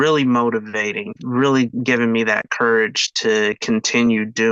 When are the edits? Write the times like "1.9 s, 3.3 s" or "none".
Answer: 1.0 s, 1.8 s